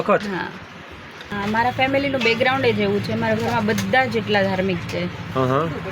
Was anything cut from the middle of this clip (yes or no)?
yes